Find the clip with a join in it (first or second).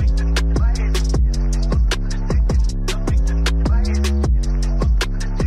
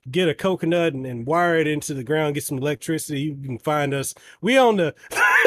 first